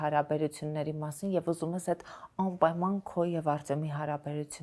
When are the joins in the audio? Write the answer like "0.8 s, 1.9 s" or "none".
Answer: none